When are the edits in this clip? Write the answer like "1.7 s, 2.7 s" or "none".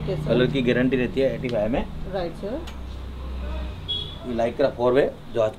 none